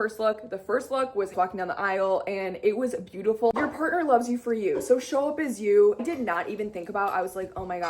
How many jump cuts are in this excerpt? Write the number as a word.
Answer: one